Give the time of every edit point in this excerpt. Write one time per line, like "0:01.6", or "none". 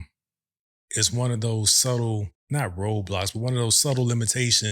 0:02.3